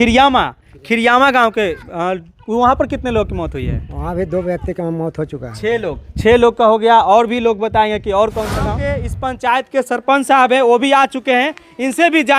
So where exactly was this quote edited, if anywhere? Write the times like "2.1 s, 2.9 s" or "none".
8.8 s